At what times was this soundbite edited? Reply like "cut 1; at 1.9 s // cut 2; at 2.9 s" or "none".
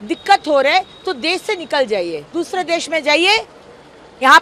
none